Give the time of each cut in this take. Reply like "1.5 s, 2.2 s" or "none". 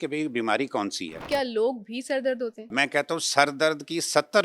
1.2 s, 2.7 s